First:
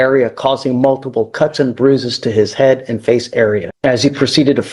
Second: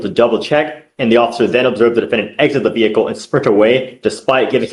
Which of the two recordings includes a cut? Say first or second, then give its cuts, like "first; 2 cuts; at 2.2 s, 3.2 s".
first; 1 cut; at 3.7 s